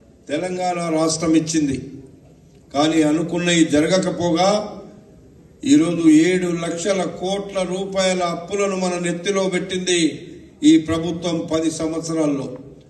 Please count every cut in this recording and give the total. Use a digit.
1